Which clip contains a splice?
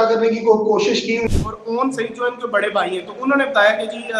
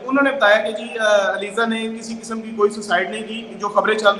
first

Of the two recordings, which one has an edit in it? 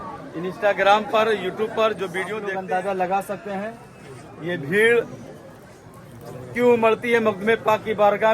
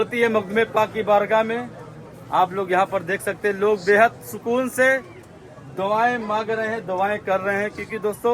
first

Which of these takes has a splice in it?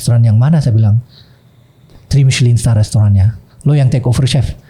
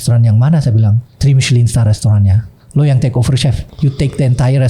second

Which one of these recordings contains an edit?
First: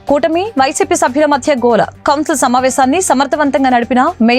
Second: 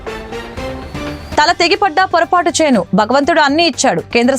second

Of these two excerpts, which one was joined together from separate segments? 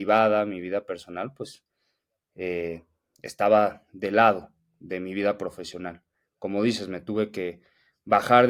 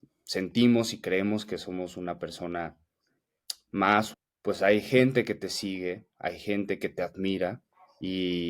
second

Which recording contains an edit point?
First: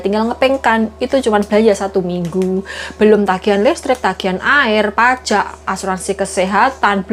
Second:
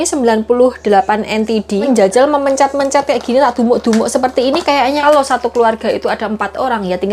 second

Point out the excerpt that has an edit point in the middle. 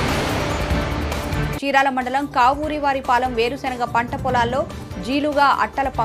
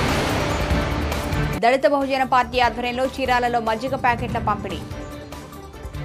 first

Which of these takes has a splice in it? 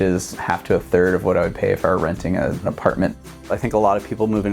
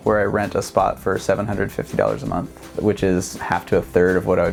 first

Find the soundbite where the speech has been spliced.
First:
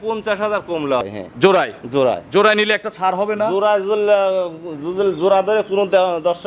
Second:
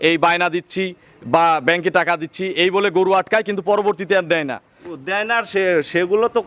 first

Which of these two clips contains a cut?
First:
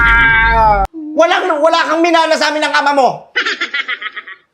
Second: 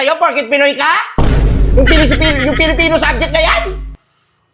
first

